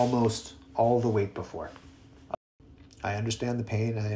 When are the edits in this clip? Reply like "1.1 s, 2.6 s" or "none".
2.3 s

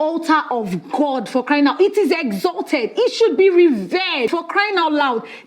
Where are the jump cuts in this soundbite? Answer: 4.3 s

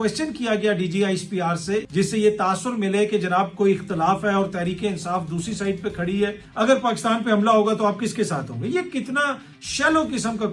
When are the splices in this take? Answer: 1.9 s, 6.4 s

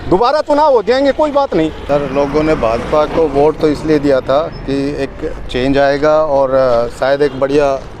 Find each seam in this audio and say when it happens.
1.8 s

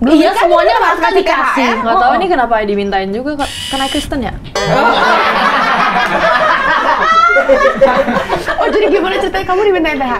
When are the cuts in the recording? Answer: none

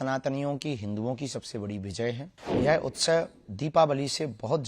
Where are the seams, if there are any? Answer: 2.3 s

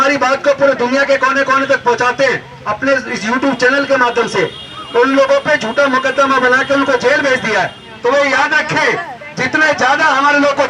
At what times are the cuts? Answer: 7.8 s

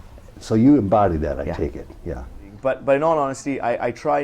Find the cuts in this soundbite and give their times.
2.5 s

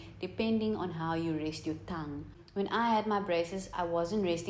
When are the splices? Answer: 2.4 s

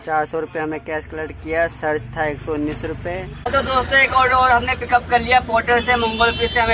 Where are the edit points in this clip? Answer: 3.5 s

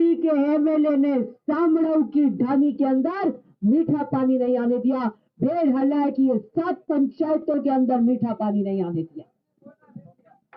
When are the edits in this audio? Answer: none

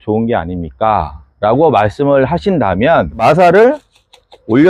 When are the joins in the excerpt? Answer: 3.2 s

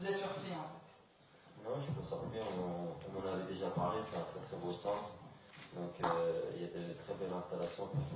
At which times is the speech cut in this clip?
1.0 s

